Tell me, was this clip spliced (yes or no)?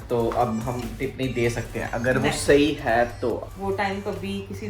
yes